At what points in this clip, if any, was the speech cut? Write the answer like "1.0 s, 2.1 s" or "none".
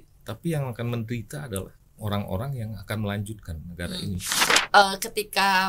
1.8 s, 4.5 s